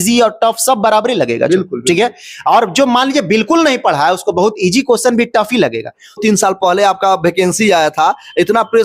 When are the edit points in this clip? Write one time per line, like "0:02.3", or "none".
0:06.2